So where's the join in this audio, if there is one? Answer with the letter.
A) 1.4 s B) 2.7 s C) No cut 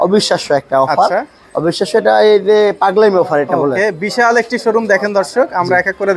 C